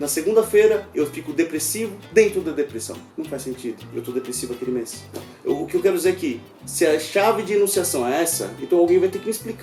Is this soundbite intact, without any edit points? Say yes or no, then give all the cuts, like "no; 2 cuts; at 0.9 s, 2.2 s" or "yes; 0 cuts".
yes; 0 cuts